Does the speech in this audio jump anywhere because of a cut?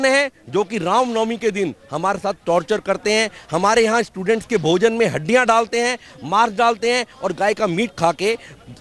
no; 0 cuts

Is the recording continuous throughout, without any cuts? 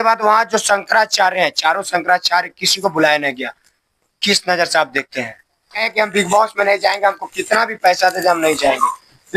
no; 1 cut; at 5.8 s

